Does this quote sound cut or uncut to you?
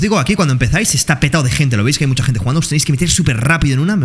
uncut